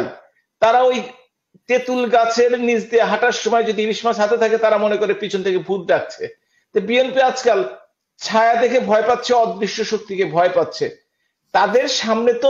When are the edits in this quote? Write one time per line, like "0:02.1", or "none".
none